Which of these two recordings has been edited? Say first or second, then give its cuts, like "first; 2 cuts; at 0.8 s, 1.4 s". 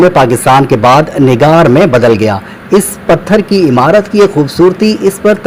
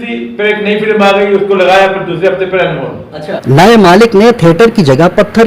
second; 1 cut; at 3.3 s